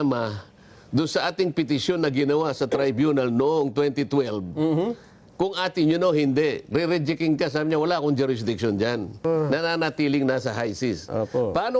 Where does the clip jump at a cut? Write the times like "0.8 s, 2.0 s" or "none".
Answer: 9.2 s